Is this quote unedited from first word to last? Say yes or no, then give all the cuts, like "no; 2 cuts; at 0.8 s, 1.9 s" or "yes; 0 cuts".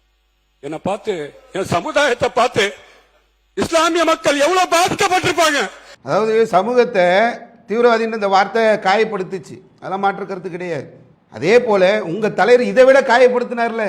no; 1 cut; at 6.0 s